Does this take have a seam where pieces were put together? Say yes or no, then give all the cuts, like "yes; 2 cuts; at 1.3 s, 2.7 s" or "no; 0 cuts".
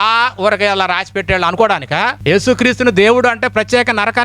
yes; 1 cut; at 2.2 s